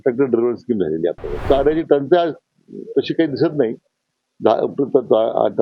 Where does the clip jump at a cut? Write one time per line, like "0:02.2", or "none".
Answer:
0:01.4

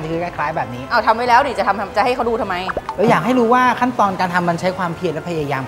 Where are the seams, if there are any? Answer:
none

